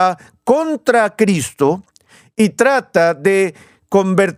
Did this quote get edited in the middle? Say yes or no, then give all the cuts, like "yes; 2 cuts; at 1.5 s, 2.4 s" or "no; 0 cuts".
no; 0 cuts